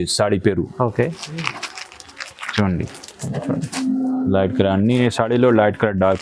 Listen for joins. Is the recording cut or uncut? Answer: uncut